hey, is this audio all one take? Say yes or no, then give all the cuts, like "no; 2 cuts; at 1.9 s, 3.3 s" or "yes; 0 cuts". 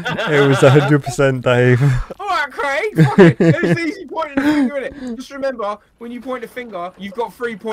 no; 1 cut; at 2.1 s